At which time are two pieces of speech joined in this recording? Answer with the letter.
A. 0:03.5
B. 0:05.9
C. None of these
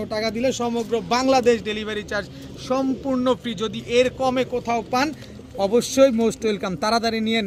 C